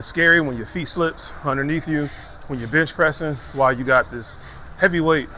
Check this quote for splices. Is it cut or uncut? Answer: uncut